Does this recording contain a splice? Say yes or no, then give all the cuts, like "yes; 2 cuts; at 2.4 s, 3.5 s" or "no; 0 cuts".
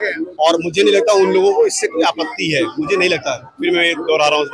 no; 0 cuts